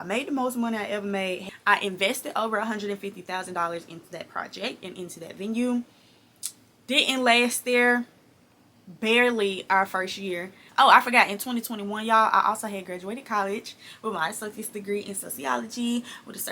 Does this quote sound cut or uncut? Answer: cut